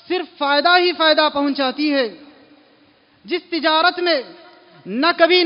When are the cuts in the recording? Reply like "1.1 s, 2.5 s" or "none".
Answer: none